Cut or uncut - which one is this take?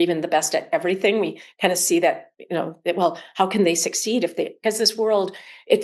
uncut